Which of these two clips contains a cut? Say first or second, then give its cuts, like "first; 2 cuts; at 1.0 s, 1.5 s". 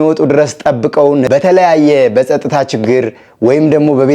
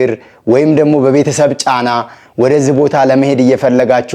first; 1 cut; at 1.3 s